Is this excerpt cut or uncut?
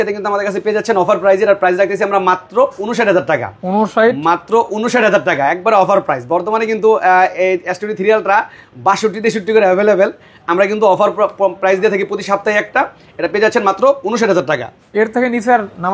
uncut